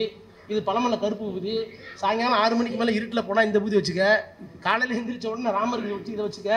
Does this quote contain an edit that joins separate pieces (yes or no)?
no